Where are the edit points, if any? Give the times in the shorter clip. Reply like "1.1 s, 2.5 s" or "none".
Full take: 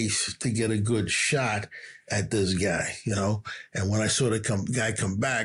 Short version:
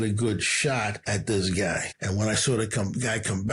1.0 s, 1.9 s